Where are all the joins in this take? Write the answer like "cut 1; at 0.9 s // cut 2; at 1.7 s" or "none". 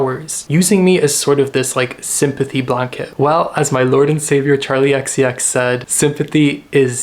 cut 1; at 5.9 s